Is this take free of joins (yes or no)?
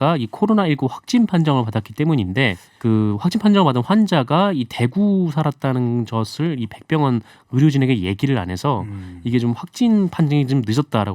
no